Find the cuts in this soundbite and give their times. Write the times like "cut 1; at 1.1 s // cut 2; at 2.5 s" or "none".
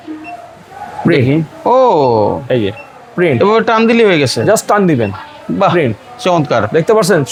none